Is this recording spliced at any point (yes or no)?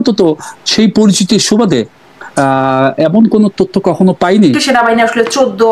yes